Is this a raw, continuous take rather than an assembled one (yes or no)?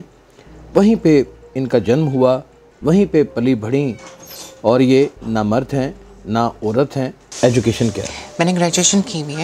no